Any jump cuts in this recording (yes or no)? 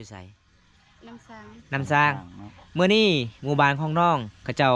no